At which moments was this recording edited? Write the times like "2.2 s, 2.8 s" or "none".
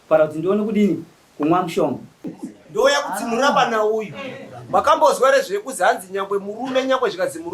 2.3 s